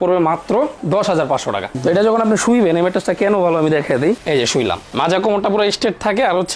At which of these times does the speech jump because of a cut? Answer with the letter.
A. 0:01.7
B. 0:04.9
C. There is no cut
A